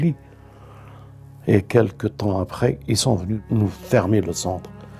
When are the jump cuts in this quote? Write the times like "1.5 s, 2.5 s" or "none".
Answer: 3.4 s